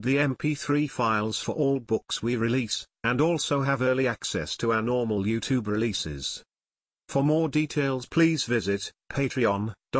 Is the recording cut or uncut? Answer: uncut